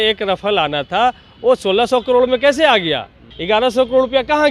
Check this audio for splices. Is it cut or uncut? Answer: cut